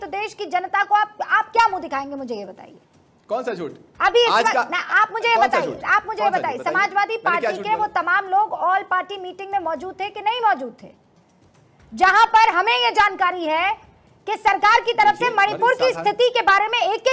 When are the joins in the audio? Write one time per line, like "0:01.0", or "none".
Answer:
none